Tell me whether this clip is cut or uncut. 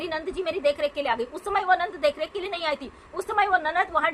uncut